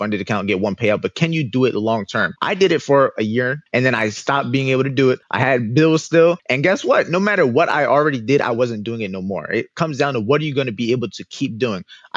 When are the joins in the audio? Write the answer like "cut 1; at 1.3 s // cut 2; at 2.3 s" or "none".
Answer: cut 1; at 2.3 s // cut 2; at 3.6 s // cut 3; at 5.3 s // cut 4; at 6.5 s